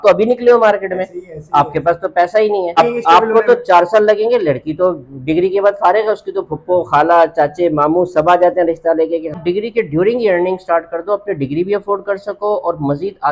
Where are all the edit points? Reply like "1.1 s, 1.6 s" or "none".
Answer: 2.8 s, 9.4 s